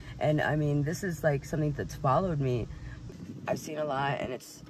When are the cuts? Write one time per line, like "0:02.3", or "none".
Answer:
0:03.0